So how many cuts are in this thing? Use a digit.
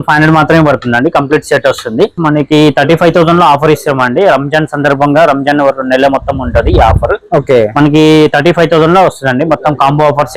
1